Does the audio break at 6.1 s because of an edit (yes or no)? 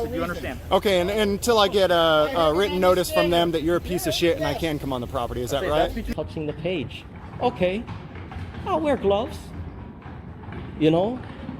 yes